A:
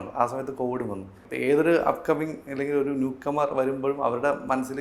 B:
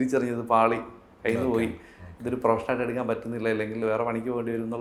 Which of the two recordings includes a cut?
A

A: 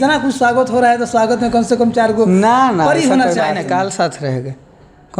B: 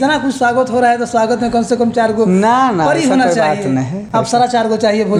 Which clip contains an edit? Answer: A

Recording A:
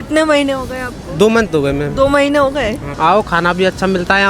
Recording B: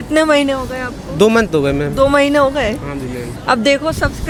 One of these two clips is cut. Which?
A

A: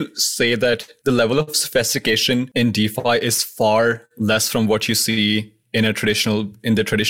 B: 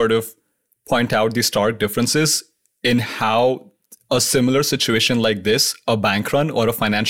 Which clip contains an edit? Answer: A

